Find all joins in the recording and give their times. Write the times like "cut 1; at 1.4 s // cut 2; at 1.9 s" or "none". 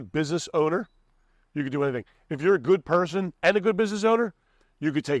none